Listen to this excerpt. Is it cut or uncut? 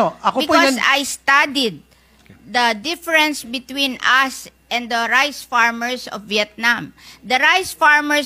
uncut